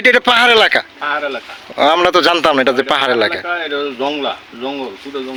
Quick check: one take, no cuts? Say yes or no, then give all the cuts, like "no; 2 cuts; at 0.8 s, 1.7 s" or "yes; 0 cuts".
yes; 0 cuts